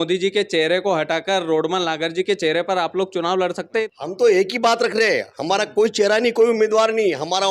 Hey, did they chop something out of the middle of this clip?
yes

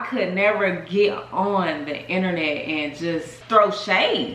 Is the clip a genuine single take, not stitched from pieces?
no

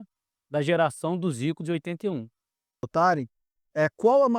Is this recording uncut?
no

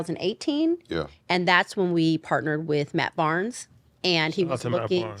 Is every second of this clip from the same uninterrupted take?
yes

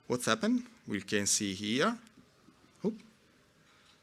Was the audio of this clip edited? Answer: no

